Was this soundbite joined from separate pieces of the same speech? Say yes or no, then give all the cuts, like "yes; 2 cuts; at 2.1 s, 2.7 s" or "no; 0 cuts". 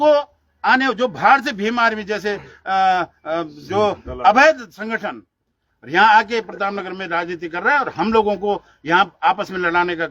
no; 0 cuts